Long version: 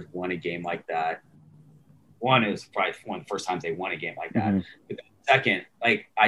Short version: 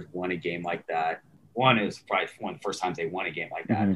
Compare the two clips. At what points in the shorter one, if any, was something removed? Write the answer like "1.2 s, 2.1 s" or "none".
1.3 s